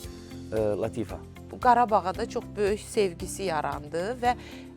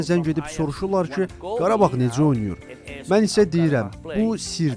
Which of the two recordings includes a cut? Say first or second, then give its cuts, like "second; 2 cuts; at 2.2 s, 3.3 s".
first; 1 cut; at 1.4 s